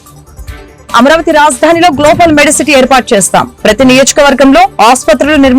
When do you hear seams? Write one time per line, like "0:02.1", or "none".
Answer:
0:00.9